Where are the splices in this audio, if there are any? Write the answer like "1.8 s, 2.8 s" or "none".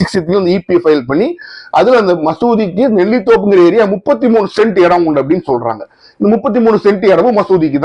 none